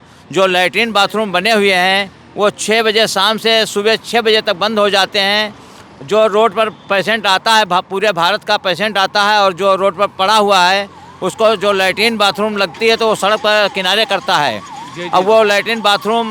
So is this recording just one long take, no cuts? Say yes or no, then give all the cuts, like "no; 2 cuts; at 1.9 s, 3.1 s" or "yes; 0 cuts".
yes; 0 cuts